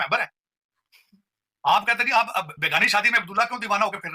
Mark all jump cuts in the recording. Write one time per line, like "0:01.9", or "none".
none